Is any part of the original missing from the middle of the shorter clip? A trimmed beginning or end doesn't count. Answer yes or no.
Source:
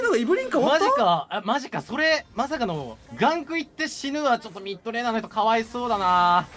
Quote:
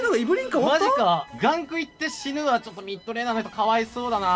yes